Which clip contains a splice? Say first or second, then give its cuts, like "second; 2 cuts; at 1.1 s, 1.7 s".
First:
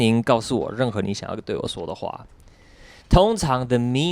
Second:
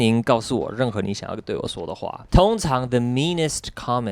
second; 1 cut; at 2.2 s